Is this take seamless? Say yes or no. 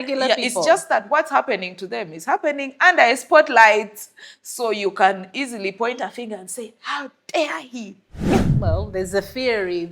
no